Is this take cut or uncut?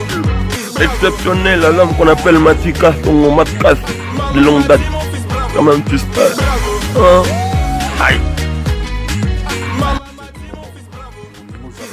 uncut